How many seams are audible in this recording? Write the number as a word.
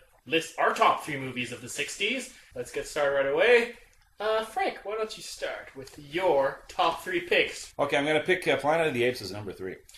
one